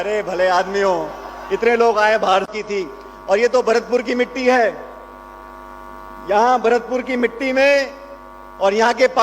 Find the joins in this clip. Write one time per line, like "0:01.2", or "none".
0:02.5